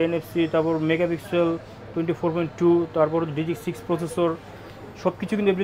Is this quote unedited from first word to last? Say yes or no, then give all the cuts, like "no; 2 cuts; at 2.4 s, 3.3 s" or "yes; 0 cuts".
yes; 0 cuts